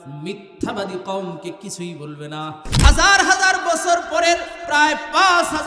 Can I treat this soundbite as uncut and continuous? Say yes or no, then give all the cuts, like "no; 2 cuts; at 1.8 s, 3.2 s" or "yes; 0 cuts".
no; 1 cut; at 2.7 s